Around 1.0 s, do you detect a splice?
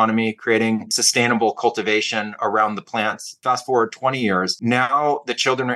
yes; 3 cuts; at 1.0 s, 3.3 s, 4.5 s

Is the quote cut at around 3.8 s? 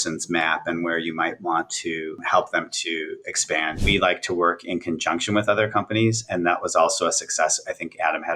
yes; 2 cuts; at 2.2 s, 3.8 s

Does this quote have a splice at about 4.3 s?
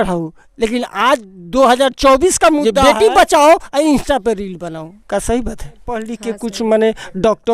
no; 2 cuts; at 2.7 s, 6.1 s

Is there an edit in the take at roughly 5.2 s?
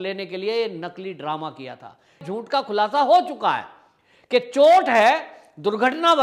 no; 1 cut; at 2.2 s

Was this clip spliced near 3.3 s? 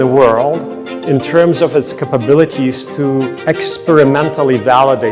yes; 1 cut; at 3.3 s

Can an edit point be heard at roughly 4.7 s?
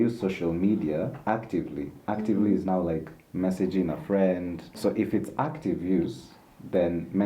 yes; 1 cut; at 4.7 s

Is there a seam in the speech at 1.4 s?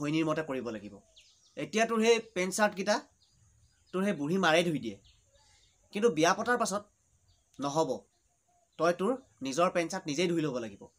no; 0 cuts

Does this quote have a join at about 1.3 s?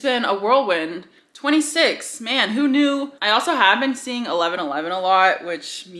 no; 1 cut; at 3.1 s

